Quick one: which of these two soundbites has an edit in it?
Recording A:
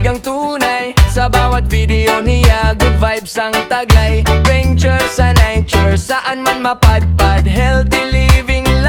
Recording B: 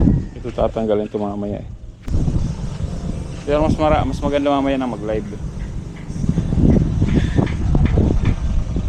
B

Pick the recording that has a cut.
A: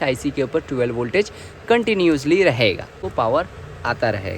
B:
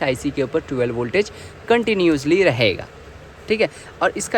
A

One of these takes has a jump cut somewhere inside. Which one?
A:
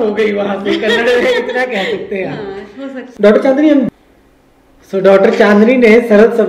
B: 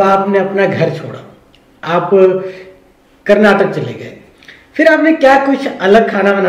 A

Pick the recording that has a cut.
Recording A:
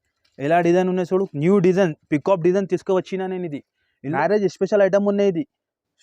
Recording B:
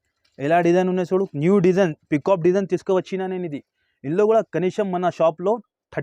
A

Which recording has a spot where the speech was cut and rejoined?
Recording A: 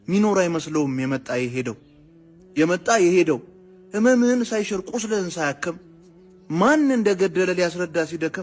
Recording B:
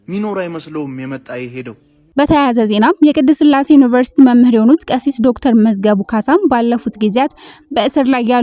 B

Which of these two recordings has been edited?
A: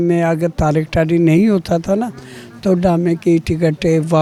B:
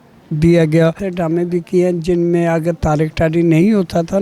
B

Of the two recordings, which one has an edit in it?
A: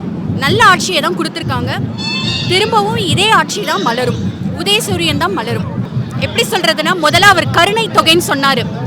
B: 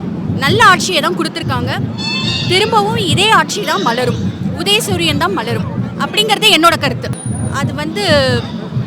A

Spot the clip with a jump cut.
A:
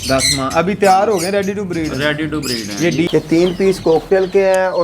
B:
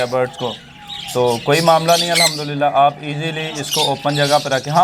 A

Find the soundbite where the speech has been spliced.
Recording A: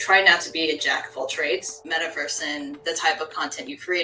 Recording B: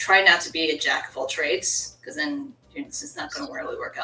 A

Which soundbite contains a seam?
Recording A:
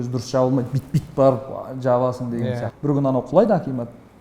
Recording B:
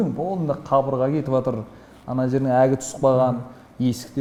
A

